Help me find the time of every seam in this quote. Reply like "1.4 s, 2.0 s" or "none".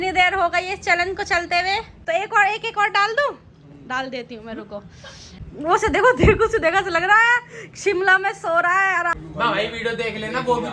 1.9 s, 5.4 s, 9.1 s